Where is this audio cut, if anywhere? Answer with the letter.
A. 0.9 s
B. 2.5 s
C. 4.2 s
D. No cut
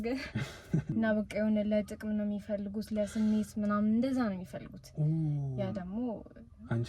A